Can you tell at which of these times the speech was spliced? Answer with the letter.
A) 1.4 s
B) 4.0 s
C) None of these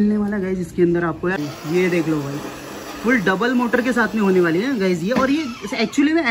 A